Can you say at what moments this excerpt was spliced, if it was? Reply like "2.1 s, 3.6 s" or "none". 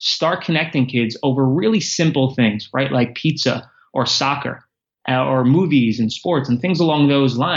none